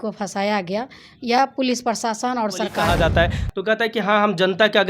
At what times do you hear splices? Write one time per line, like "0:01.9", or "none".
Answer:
0:02.8